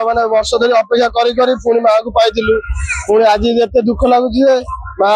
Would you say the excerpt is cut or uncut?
uncut